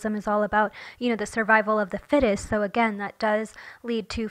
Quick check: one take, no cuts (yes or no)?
yes